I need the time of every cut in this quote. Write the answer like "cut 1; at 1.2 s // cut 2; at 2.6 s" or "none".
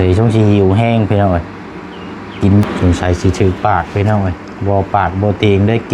cut 1; at 2.6 s